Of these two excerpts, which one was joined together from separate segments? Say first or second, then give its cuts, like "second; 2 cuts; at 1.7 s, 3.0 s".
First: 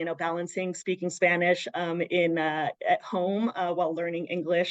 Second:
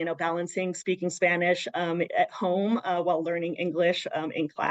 second; 1 cut; at 2.1 s